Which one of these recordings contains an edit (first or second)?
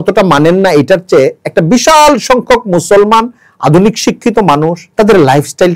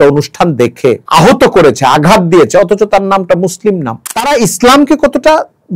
second